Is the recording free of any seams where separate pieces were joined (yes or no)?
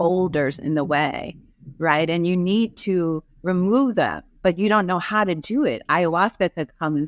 yes